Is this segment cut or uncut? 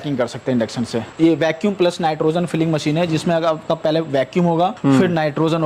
cut